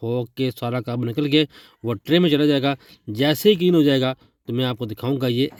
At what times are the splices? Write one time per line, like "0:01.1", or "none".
none